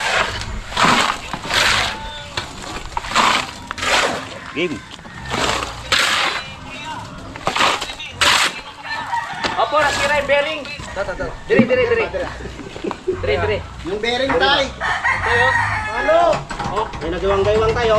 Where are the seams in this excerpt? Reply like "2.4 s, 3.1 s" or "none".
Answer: 10.8 s